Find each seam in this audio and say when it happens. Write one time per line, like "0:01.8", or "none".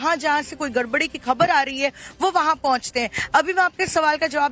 0:02.3

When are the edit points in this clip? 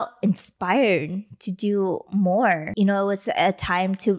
0:02.7

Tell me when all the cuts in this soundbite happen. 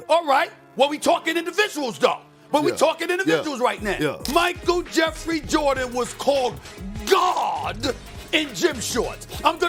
none

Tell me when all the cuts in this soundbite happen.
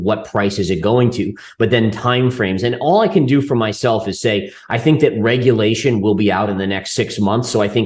none

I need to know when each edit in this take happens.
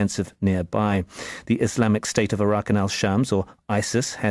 0:02.1

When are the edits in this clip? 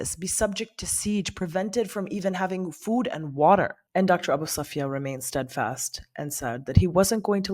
0:03.8

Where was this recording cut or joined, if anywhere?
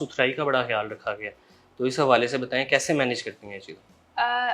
none

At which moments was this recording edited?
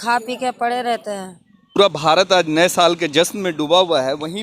0:01.8

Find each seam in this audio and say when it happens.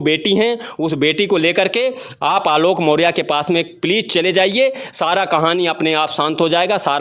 none

